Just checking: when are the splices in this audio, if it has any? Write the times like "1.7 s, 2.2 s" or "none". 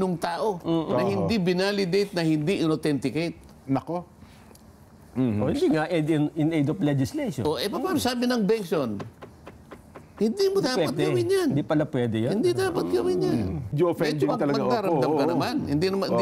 13.8 s

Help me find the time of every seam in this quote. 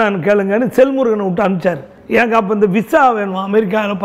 1.9 s

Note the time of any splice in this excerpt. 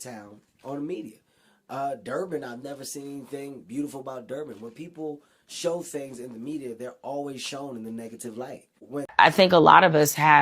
9.1 s

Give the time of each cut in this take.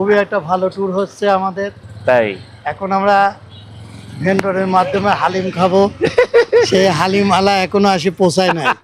none

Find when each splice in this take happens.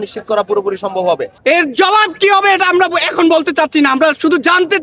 1.3 s

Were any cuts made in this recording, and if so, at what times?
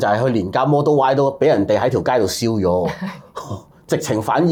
none

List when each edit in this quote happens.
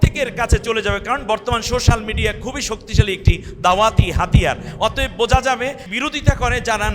5.9 s

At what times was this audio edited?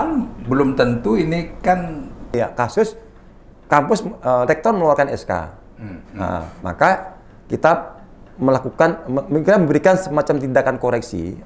2.3 s

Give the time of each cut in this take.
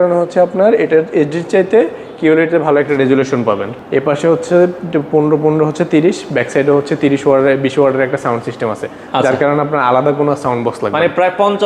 3.7 s, 4.8 s

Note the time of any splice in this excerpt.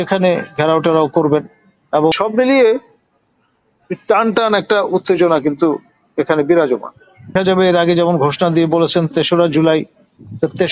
2.2 s, 7.3 s

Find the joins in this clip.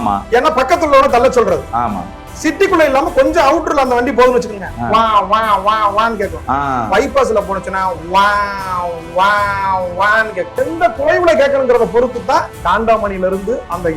10.6 s, 12.5 s

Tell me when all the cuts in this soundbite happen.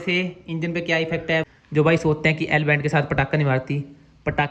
1.5 s

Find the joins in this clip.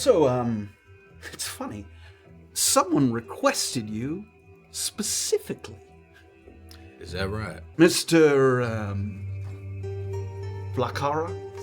7.6 s

